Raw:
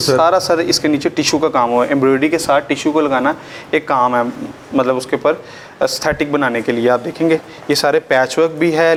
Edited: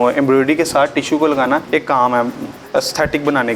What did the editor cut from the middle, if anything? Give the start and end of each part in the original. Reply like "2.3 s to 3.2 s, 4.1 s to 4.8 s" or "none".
3.4 s to 3.6 s, 4.5 s to 5.6 s

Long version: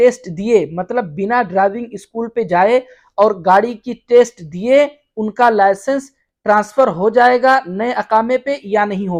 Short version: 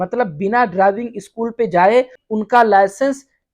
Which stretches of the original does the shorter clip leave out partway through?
3.0 s to 5.1 s

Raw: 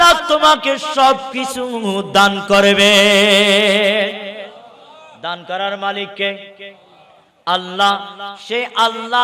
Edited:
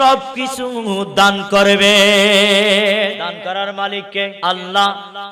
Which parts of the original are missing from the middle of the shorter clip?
4.1 s to 5.2 s, 6.4 s to 7.4 s

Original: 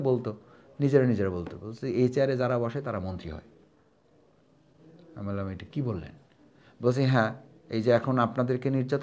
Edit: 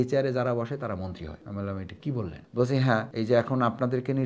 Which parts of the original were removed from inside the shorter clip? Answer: 3.4 s to 5.1 s, 6.1 s to 6.7 s, 7.4 s to 7.7 s

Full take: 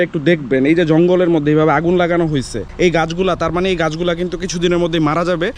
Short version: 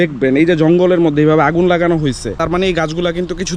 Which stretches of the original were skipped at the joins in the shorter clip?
2.7 s to 3.4 s

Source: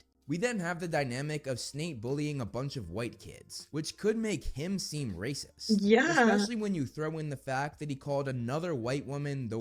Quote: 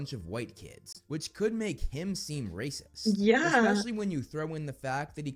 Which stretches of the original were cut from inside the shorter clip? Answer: none

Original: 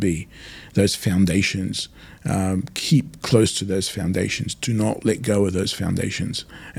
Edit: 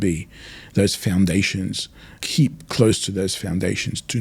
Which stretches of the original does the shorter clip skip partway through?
2.2 s to 2.7 s

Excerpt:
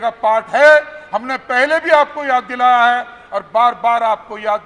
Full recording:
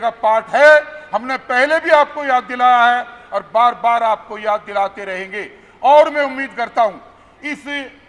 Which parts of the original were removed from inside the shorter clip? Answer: none

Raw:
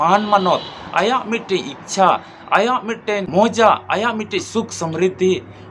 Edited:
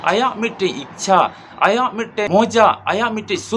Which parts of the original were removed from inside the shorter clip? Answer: 2.5 s to 2.7 s

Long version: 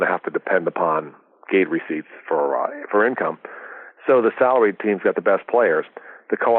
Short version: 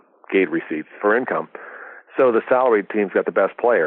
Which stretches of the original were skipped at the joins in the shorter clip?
2.1 s to 2.8 s

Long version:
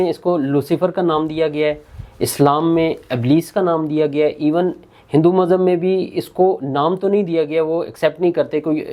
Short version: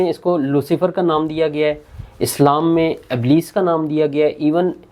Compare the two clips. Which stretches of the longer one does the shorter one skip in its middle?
none

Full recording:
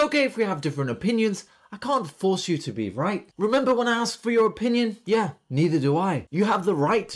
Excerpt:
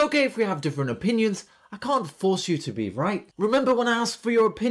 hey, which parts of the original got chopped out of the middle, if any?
none

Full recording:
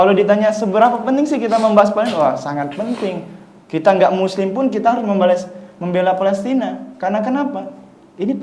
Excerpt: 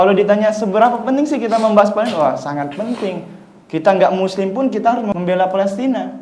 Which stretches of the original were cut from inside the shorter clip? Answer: 5.1 s to 5.8 s

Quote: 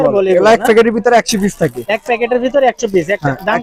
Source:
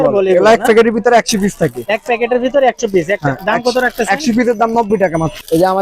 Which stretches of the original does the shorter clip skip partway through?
none

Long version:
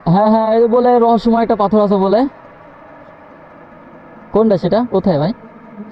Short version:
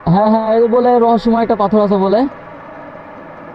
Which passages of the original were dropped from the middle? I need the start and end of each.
2.3 s to 2.4 s

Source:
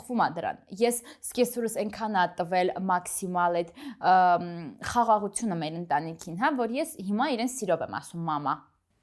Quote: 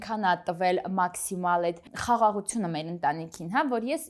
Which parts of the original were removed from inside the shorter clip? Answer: 3.8 s to 4.8 s

